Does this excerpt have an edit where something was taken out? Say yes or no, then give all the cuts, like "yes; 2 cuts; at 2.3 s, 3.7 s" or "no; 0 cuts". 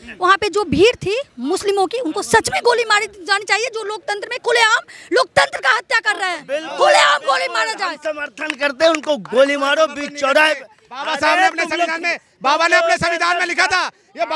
no; 0 cuts